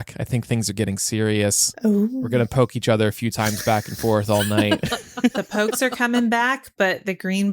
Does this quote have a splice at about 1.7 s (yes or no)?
yes